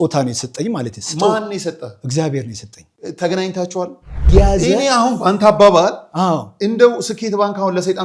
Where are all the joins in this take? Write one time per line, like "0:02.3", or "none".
0:04.3